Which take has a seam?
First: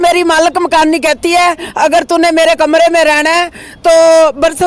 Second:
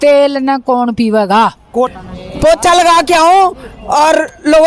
second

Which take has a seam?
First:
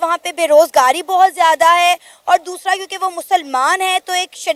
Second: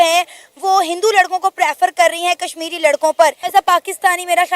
second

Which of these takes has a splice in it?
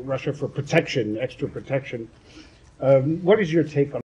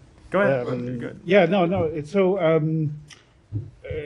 second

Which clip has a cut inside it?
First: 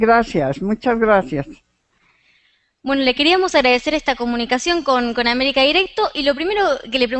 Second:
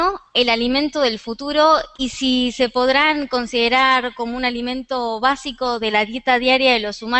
first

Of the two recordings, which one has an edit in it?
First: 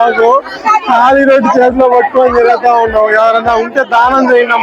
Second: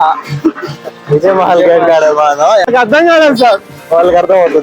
second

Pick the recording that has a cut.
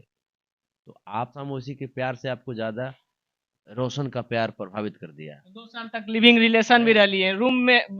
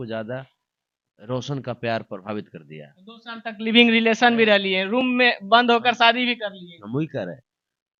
first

